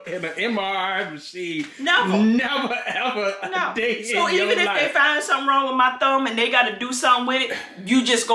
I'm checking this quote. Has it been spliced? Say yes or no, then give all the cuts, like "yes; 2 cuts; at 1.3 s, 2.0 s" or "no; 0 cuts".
no; 0 cuts